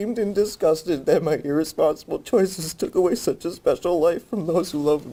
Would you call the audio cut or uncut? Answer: uncut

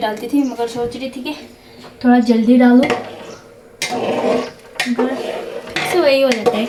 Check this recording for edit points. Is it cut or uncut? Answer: uncut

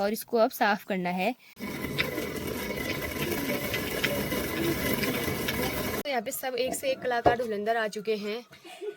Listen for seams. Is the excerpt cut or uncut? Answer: cut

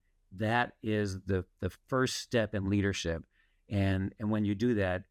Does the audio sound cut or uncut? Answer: uncut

